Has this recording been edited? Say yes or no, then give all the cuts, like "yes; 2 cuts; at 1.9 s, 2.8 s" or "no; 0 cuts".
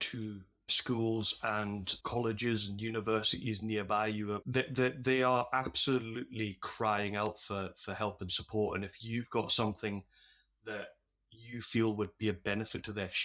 yes; 1 cut; at 4.4 s